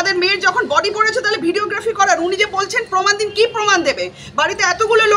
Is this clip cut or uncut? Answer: uncut